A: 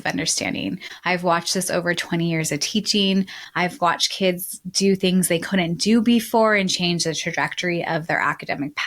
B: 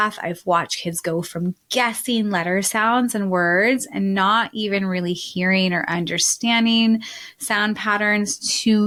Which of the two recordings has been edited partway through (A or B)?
A